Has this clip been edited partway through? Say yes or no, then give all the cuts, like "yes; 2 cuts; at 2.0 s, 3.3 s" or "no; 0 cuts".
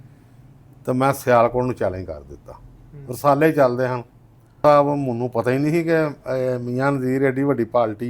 yes; 1 cut; at 4.6 s